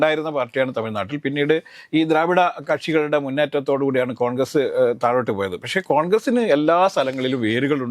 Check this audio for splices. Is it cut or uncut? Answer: uncut